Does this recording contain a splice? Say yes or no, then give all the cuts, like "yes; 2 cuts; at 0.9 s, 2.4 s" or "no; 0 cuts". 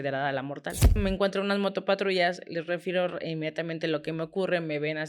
yes; 1 cut; at 1.0 s